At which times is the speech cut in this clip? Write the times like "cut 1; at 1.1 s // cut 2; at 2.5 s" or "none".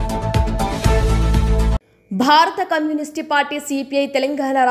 cut 1; at 1.7 s

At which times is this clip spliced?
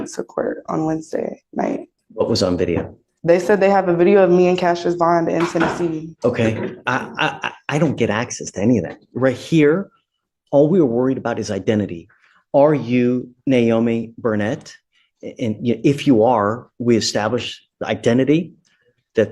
cut 1; at 2.0 s // cut 2; at 6.1 s

